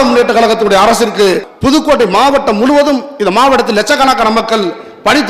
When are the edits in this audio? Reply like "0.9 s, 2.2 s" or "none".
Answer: 1.5 s

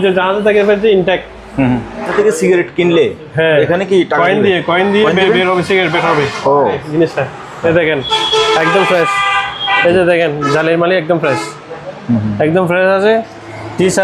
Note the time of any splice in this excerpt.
2.1 s, 6.8 s

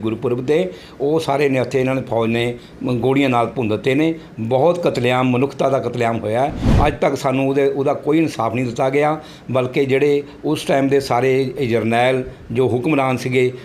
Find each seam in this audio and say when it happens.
6.6 s

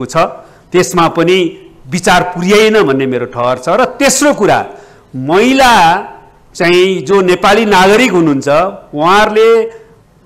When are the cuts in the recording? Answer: none

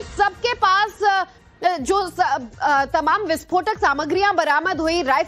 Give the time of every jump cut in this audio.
4.0 s

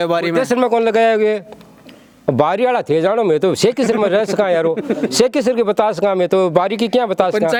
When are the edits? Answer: none

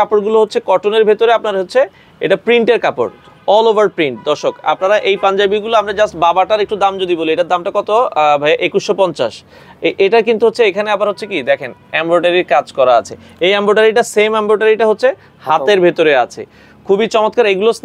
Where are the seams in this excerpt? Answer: none

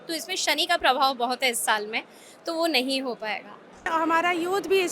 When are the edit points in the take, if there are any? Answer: 3.9 s

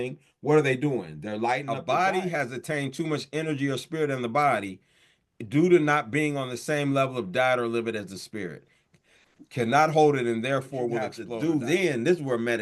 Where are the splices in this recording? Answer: 1.7 s, 11.2 s

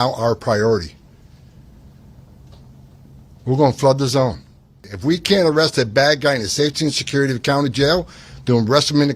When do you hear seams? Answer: 4.9 s

